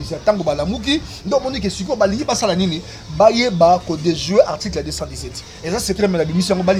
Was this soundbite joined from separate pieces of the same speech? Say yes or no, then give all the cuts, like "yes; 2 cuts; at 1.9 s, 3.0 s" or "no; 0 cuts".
no; 0 cuts